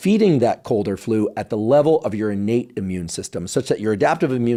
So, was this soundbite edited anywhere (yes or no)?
no